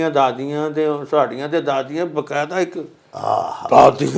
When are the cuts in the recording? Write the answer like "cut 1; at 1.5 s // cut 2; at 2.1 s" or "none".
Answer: none